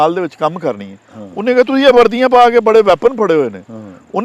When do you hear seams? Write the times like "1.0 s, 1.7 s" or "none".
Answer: none